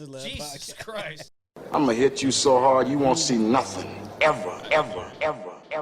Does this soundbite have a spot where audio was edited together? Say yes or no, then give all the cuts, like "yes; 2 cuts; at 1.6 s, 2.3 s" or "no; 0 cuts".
yes; 1 cut; at 1.3 s